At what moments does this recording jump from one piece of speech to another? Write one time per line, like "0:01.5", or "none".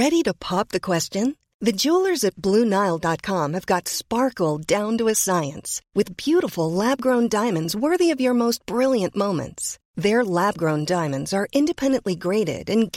none

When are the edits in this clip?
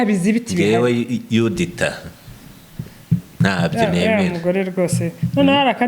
none

